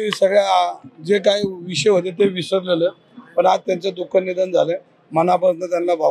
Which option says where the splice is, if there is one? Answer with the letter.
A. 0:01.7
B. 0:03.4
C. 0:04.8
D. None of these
D